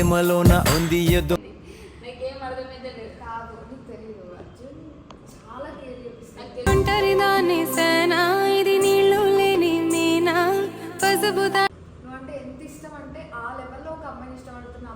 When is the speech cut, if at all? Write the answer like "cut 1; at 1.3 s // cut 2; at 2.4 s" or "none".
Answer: cut 1; at 1.4 s // cut 2; at 11.8 s